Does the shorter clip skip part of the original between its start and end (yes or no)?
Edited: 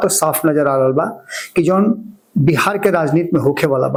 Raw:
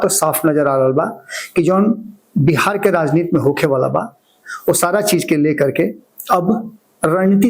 no